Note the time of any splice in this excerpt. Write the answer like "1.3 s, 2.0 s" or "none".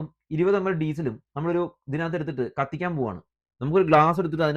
3.5 s